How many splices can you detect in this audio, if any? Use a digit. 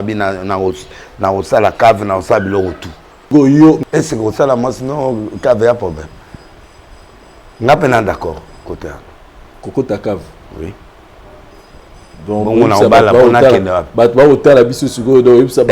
2